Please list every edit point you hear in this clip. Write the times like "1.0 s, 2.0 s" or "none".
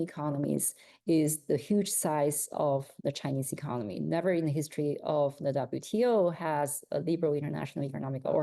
none